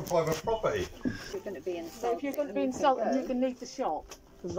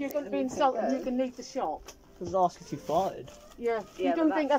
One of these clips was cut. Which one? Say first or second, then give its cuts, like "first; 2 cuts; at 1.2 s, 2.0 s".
first; 1 cut; at 1.2 s